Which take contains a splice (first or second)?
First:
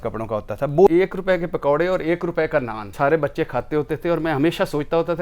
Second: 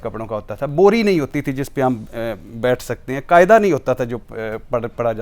first